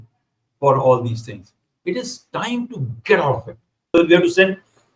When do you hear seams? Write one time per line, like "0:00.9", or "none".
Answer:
0:03.8